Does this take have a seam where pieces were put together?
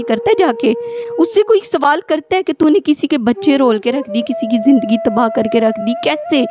no; 0 cuts

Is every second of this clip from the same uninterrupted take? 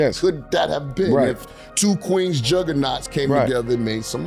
yes; 0 cuts

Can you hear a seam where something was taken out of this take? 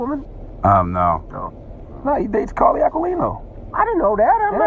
no; 0 cuts

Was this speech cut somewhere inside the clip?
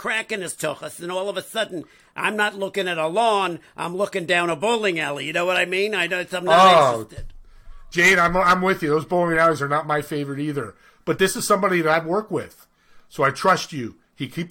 no; 0 cuts

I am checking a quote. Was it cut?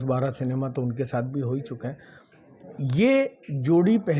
no; 0 cuts

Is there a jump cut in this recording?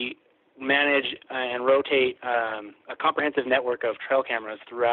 no; 0 cuts

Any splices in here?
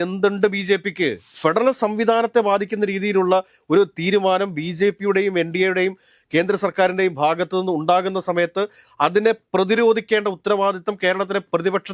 yes; 1 cut; at 1.3 s

